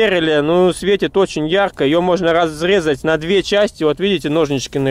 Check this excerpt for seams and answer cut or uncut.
uncut